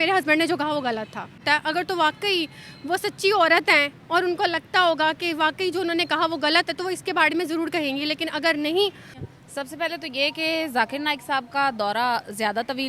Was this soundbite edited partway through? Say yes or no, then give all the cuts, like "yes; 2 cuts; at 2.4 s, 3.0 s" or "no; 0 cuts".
yes; 2 cuts; at 1.4 s, 9.2 s